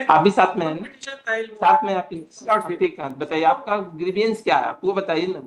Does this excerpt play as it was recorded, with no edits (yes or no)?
yes